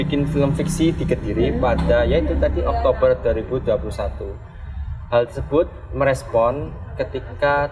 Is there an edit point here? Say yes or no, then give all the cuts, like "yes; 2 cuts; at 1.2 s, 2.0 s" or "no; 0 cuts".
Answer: no; 0 cuts